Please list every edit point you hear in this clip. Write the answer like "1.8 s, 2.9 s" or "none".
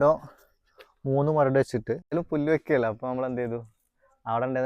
2.1 s